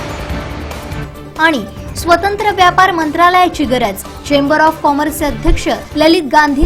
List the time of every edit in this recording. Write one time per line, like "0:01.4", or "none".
0:01.0